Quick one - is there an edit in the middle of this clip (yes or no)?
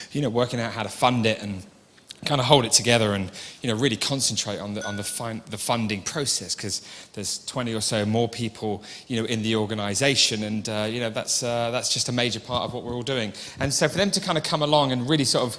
no